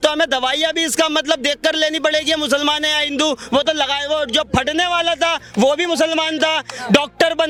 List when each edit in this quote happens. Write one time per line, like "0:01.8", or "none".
none